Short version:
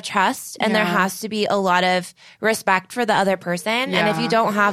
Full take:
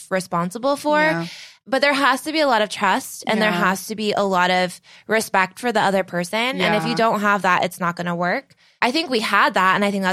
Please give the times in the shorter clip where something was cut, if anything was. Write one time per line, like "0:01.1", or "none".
none